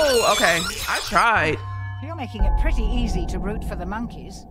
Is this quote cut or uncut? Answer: uncut